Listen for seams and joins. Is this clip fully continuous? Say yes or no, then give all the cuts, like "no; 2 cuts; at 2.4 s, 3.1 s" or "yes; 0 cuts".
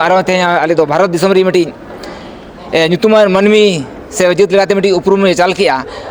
yes; 0 cuts